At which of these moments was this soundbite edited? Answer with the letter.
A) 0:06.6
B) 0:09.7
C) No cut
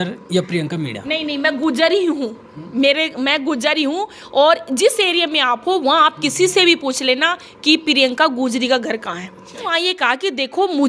B